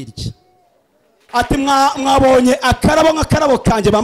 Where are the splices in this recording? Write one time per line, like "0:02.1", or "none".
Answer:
0:01.1